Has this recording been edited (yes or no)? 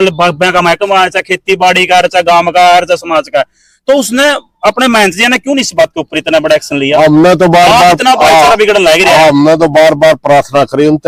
no